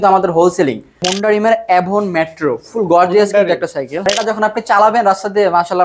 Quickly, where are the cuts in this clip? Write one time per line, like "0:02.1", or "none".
0:01.1
0:04.0